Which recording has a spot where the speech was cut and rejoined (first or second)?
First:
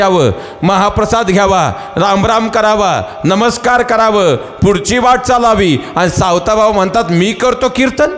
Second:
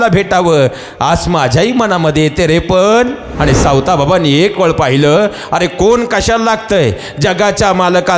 second